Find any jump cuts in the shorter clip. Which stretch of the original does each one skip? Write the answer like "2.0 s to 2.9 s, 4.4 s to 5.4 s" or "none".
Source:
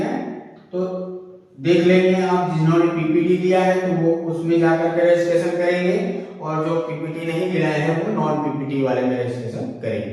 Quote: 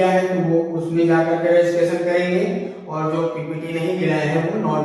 none